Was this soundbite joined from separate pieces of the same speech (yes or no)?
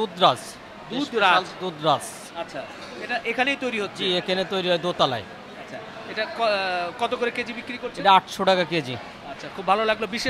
no